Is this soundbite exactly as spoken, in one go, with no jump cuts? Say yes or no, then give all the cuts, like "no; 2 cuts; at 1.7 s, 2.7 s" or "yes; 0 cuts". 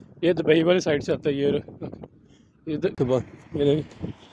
no; 1 cut; at 2.9 s